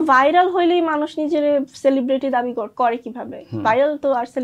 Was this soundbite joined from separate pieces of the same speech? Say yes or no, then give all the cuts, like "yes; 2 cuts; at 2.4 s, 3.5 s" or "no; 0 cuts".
no; 0 cuts